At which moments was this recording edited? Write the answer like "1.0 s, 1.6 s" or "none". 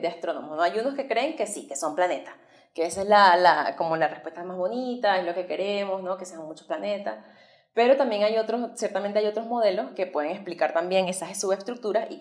none